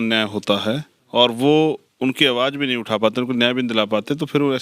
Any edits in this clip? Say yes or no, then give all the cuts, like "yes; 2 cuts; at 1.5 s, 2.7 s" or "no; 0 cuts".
yes; 1 cut; at 0.9 s